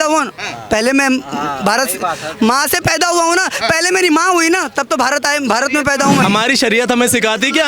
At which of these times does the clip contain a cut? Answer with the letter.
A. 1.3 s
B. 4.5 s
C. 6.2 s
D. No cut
C